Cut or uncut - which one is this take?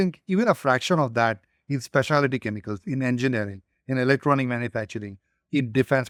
uncut